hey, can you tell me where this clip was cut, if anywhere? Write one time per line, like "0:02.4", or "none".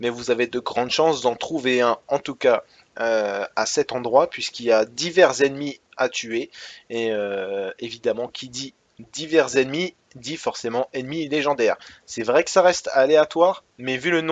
0:03.7